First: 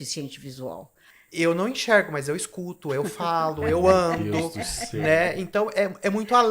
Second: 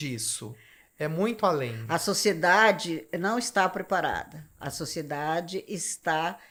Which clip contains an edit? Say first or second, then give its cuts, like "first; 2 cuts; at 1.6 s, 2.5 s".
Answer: first; 1 cut; at 1.0 s